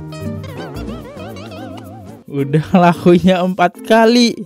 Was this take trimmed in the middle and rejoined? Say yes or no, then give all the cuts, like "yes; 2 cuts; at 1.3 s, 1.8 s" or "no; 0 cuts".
yes; 1 cut; at 2.2 s